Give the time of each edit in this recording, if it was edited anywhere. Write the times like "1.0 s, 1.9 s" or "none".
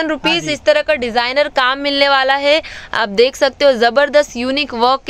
none